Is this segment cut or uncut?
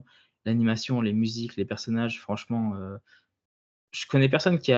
uncut